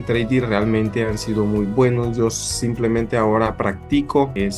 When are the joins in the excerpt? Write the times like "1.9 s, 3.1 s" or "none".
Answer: none